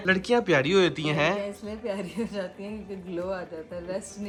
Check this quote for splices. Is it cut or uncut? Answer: uncut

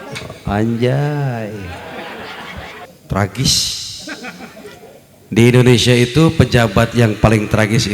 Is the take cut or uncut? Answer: cut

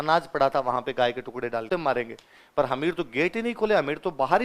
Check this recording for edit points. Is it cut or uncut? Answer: cut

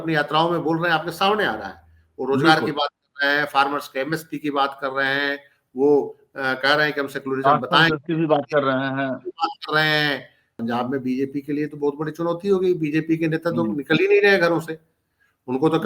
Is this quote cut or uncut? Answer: cut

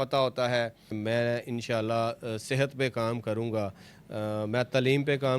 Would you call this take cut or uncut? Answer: cut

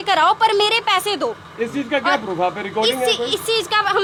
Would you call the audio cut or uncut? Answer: uncut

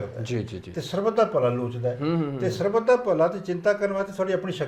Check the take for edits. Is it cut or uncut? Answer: uncut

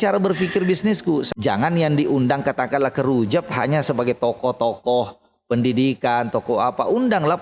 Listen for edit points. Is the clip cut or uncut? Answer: cut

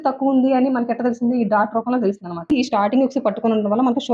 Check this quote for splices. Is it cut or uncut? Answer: cut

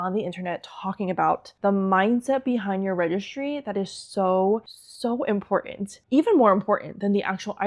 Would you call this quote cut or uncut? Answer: uncut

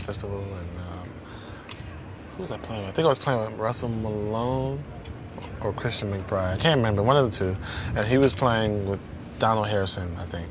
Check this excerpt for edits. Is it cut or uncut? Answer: uncut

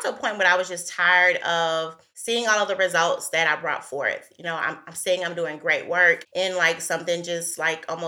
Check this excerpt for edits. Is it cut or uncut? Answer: uncut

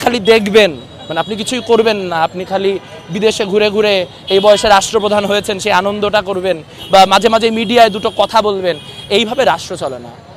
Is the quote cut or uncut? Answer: uncut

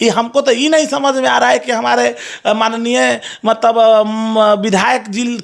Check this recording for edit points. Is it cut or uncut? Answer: uncut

